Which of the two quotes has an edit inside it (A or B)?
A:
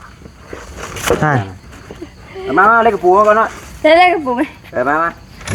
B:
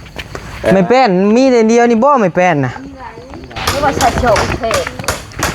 B